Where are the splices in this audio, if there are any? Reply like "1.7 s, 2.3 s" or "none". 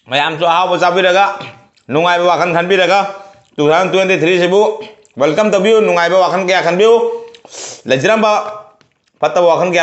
none